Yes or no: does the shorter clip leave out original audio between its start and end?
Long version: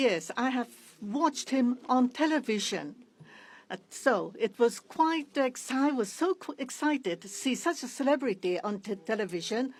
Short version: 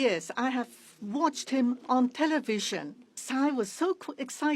yes